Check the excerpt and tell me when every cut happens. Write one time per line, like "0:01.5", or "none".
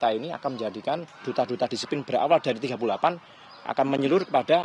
none